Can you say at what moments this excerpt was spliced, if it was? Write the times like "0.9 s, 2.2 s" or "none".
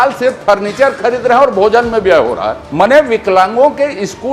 2.6 s